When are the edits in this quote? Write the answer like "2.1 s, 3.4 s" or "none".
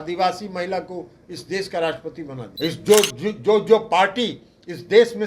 2.4 s